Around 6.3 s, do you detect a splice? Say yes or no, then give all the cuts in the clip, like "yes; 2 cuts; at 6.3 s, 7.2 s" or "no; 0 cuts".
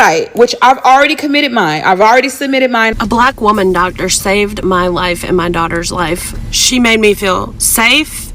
yes; 2 cuts; at 2.9 s, 6.3 s